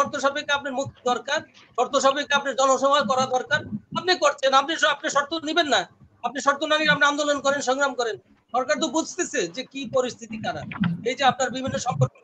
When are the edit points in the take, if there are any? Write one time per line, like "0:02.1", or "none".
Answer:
none